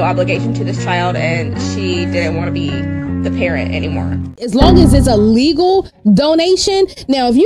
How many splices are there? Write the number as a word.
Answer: one